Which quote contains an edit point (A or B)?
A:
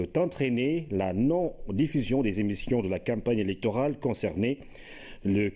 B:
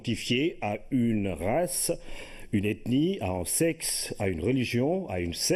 A